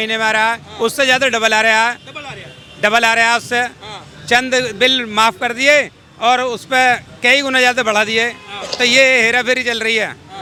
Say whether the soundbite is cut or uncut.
uncut